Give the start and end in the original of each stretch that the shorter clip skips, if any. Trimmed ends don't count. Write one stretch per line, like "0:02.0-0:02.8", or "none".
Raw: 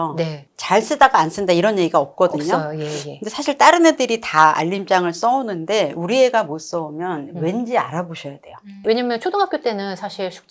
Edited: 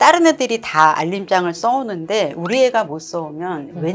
none